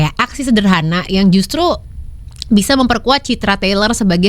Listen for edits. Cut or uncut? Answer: uncut